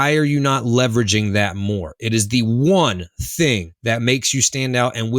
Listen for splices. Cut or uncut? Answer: cut